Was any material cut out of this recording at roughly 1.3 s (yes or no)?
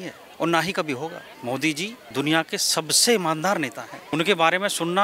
yes